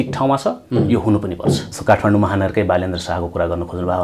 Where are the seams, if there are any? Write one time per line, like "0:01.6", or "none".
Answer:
0:01.7